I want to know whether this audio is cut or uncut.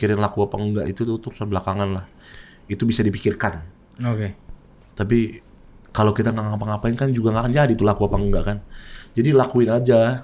uncut